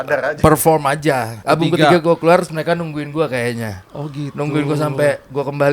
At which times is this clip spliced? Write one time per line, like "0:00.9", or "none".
0:01.4

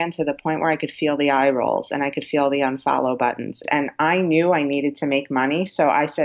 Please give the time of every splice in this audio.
0:03.6

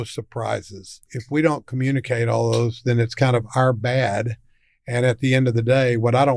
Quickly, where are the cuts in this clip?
0:01.1

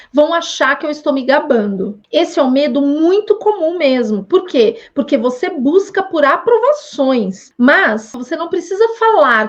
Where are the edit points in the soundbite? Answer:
0:08.1

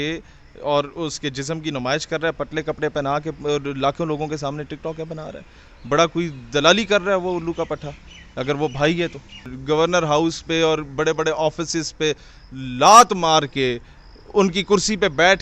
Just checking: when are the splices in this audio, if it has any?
0:09.5

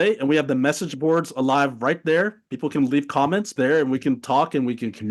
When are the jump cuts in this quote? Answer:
0:03.5

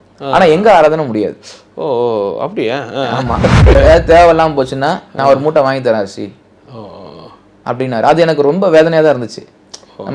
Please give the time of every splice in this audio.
0:03.8

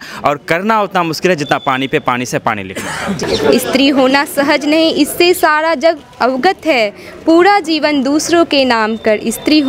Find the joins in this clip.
0:03.2

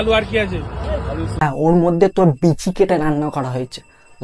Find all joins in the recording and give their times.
none

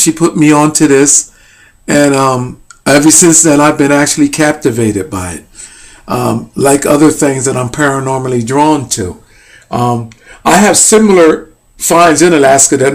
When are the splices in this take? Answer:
0:08.4

